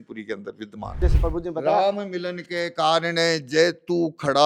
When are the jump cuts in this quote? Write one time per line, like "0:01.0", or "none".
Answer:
0:01.0